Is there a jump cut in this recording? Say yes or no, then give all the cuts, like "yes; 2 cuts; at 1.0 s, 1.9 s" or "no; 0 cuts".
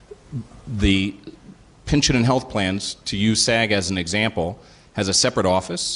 yes; 1 cut; at 1.1 s